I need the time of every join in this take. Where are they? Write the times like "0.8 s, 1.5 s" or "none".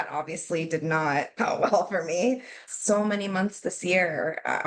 1.3 s, 2.5 s